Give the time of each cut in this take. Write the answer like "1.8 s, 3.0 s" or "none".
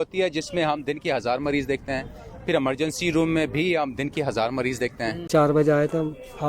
5.2 s

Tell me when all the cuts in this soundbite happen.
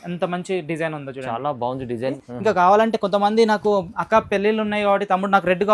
2.2 s

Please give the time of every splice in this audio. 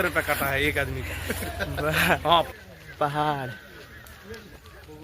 2.5 s

